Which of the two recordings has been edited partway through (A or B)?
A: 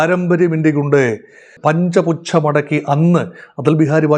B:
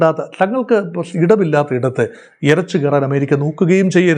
A